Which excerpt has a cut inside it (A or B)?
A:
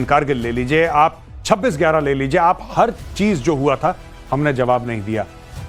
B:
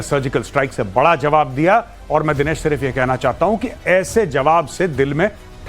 B